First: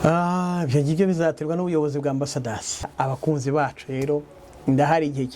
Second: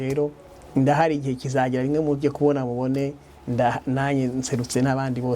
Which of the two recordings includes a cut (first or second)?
first